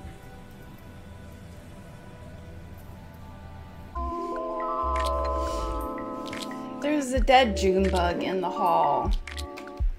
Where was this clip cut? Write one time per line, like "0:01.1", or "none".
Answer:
0:04.0